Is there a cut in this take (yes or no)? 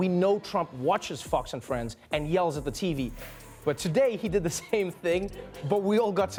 no